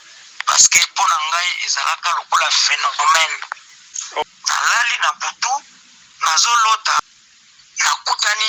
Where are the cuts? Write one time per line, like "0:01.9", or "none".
0:04.2
0:07.0